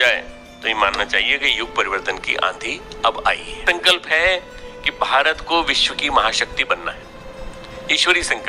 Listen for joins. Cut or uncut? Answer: cut